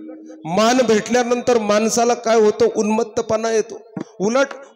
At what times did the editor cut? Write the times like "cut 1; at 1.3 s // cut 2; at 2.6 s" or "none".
none